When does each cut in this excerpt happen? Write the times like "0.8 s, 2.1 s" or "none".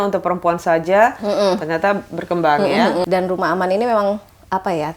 3.0 s

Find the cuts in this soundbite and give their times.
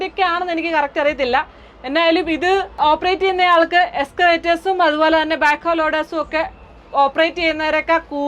none

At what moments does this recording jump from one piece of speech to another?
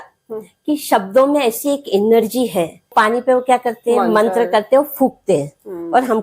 2.9 s

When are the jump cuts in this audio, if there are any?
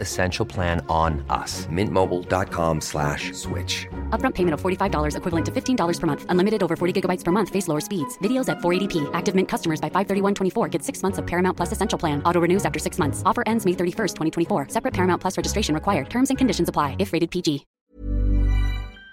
17.7 s

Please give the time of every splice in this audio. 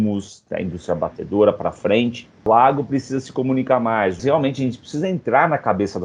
2.5 s, 4.2 s

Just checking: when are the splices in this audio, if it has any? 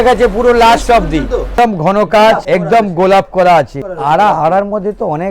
1.5 s, 2.4 s, 3.8 s

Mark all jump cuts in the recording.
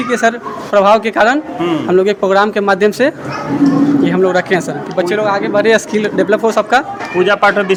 none

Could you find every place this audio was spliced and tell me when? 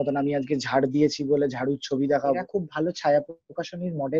2.4 s

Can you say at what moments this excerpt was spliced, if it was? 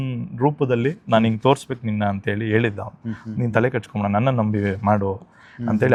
none

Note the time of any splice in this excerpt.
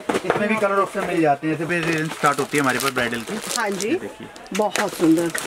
1.7 s

